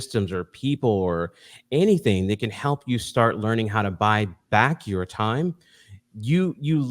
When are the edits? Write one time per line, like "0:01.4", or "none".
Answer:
none